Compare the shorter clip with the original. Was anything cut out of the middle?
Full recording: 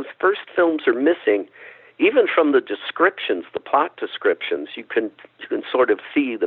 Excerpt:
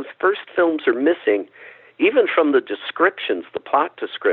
no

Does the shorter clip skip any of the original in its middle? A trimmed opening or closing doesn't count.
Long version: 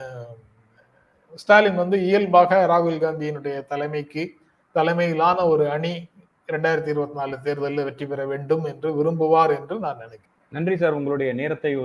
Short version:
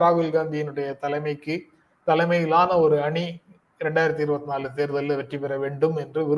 no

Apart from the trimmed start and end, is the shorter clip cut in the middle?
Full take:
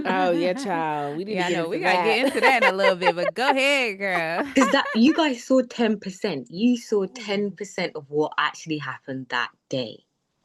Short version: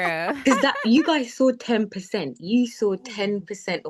no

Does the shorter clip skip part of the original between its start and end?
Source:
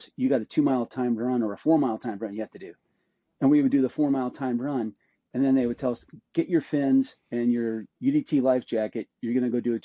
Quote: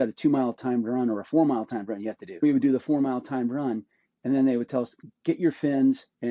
yes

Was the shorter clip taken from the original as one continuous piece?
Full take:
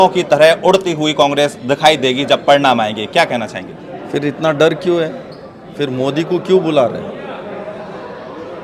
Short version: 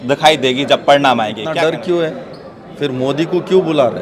no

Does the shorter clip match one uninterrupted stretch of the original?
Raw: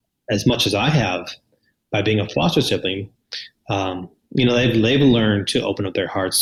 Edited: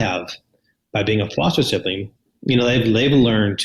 no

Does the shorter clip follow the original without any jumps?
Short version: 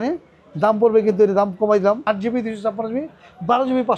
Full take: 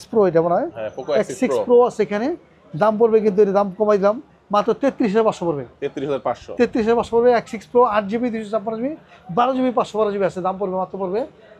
no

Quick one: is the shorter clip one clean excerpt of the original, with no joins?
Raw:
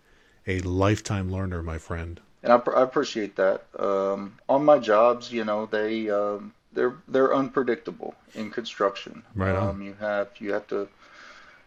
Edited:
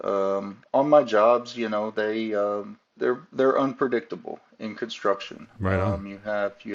yes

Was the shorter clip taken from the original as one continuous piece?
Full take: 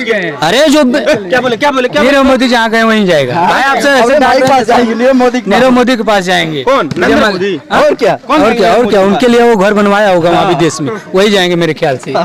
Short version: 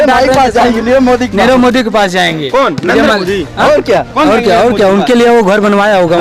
yes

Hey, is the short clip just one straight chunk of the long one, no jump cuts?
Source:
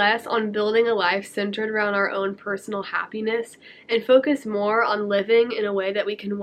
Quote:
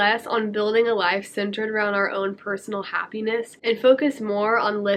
no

